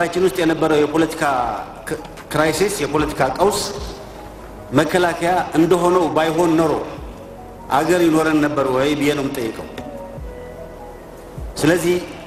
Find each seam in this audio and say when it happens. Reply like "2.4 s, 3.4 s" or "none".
none

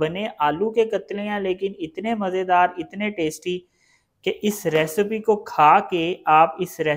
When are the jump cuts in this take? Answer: none

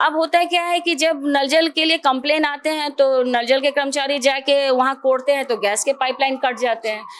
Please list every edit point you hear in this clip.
none

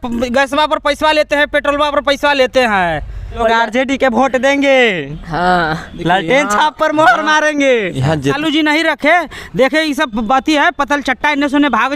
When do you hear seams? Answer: 3.4 s, 8.4 s

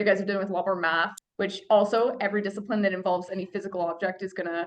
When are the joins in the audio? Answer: 1.2 s

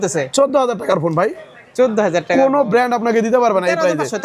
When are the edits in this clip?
none

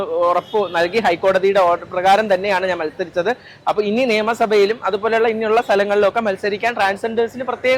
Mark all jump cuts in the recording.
none

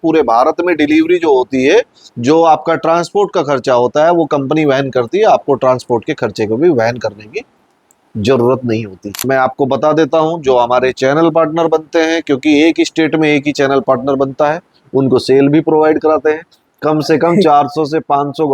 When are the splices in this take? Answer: 9.2 s

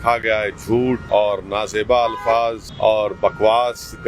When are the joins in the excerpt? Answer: 1.0 s, 2.7 s

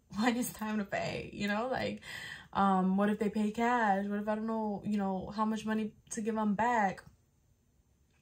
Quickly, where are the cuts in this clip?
none

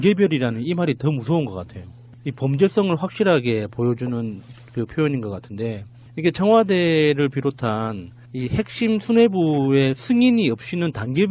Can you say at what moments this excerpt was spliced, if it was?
none

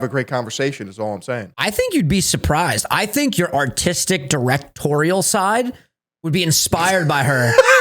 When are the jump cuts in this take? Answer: 1.5 s

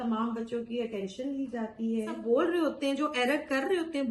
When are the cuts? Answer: 2.2 s

